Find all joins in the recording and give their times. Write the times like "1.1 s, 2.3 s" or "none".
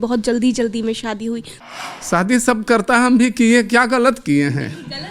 1.5 s